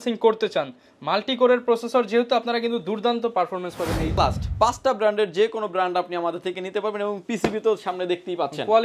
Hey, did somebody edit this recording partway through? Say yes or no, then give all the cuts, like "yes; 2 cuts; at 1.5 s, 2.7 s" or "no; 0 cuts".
yes; 1 cut; at 4.2 s